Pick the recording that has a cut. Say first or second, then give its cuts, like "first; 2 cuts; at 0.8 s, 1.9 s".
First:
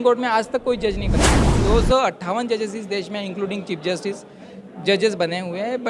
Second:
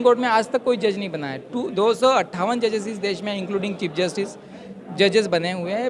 first; 1 cut; at 1.5 s